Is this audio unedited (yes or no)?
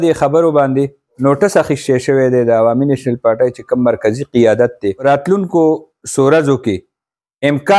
no